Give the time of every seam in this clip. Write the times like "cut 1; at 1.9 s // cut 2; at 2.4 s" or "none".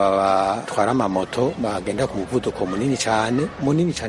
none